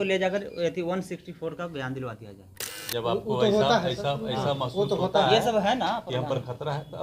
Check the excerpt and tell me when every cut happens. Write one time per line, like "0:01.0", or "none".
0:02.8